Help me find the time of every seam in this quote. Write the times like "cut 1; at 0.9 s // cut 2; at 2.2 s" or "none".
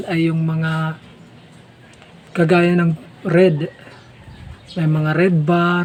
none